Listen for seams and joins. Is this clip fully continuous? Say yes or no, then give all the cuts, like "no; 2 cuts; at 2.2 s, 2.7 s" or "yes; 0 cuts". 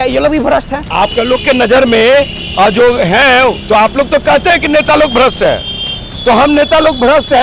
yes; 0 cuts